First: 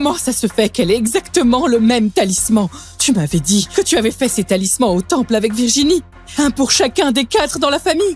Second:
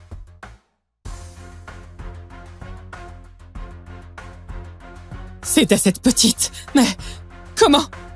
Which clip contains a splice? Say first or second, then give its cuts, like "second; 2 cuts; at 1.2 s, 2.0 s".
second; 1 cut; at 5.6 s